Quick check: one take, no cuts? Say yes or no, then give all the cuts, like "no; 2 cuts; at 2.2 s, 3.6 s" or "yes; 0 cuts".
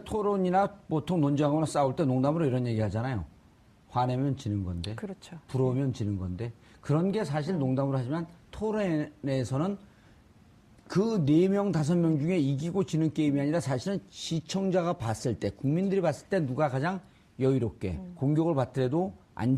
no; 1 cut; at 8.0 s